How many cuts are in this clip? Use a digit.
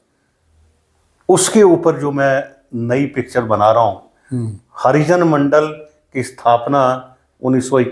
0